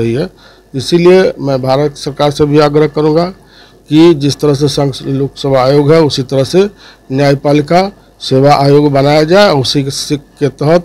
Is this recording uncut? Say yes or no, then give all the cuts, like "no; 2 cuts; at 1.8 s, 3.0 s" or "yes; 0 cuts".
yes; 0 cuts